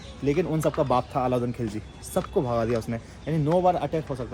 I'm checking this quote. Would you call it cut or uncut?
uncut